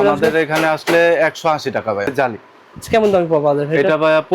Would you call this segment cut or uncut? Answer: cut